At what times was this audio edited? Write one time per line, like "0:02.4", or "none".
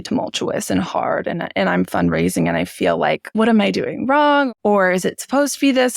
0:03.3
0:04.5